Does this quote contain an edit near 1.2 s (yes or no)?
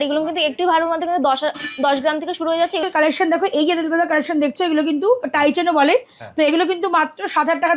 no